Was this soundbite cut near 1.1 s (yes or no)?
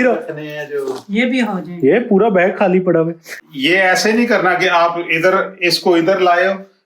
no